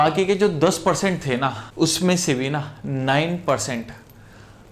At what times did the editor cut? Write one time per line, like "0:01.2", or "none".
0:01.6